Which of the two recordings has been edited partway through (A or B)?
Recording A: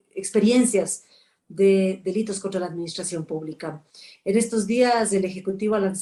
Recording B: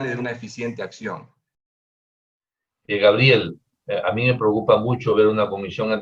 B